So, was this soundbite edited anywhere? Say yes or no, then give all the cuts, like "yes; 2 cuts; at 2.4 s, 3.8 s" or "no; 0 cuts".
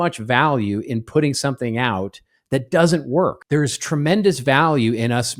yes; 1 cut; at 3.4 s